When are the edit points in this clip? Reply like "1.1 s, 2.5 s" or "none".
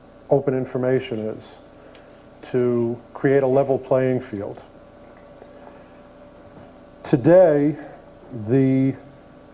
4.0 s